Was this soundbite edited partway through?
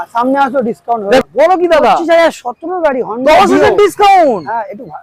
yes; 1 cut; at 1.2 s

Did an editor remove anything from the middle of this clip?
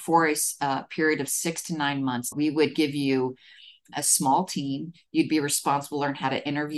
yes; 2 cuts; at 2.3 s, 3.9 s

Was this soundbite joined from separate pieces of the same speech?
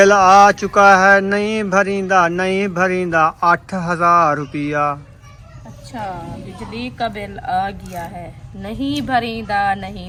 no; 0 cuts

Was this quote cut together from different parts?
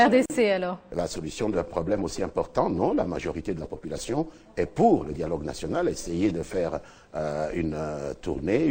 no; 0 cuts

